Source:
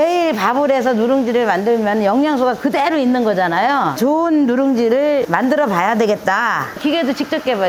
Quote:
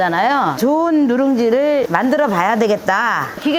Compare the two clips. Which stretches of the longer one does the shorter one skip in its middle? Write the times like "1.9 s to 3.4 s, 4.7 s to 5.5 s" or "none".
none